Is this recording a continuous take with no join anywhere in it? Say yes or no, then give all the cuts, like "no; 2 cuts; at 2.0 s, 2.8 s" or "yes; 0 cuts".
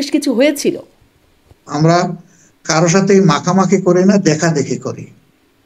no; 1 cut; at 1.6 s